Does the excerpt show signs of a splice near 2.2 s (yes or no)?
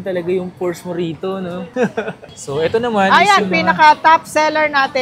yes